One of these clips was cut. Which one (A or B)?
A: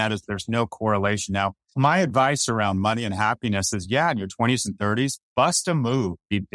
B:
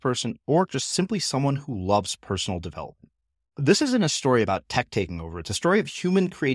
A